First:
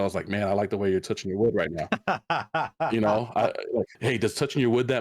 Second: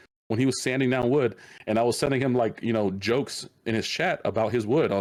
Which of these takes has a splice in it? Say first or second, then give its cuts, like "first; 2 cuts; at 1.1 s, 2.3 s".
first; 1 cut; at 3.9 s